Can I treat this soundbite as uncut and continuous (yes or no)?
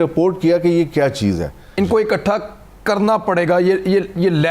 no